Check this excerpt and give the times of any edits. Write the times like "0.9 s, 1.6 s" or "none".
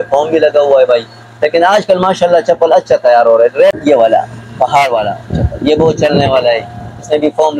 3.8 s

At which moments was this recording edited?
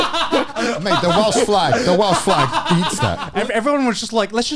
3.3 s

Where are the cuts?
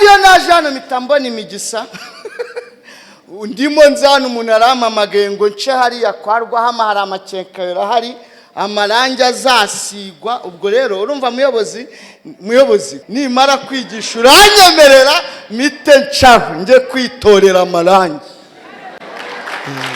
13.0 s

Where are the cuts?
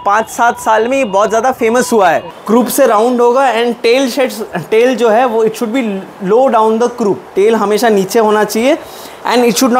2.3 s, 7.2 s

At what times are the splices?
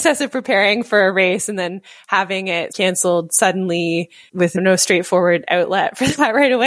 2.7 s, 4.3 s

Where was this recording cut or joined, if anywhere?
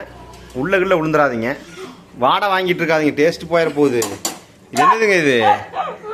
none

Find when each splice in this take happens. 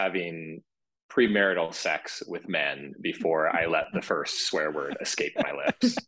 none

